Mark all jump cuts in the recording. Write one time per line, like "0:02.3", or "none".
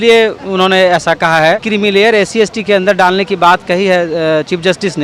0:01.6